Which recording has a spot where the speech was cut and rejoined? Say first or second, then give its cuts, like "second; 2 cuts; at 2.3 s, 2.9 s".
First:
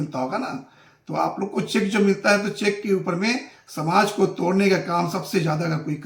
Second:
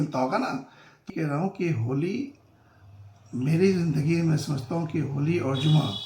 second; 1 cut; at 1.1 s